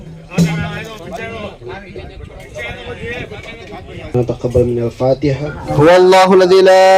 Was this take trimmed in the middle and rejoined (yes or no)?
yes